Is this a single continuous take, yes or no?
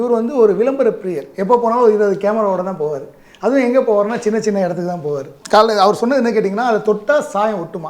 no